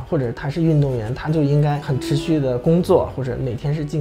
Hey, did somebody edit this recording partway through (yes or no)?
yes